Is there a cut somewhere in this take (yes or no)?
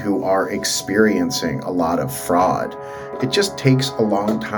yes